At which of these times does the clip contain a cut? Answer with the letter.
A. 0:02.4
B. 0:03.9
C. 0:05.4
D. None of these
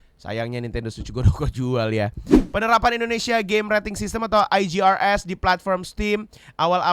A